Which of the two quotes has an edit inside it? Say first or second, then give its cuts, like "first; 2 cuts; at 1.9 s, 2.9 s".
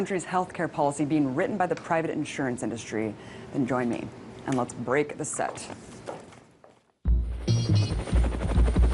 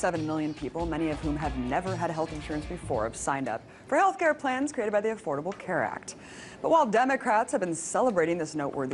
first; 1 cut; at 4.0 s